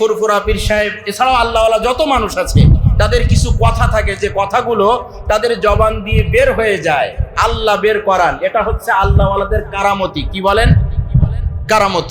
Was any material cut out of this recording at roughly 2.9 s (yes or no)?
no